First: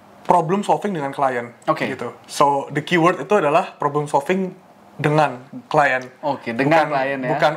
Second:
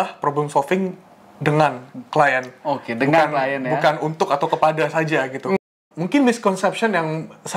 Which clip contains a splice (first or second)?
second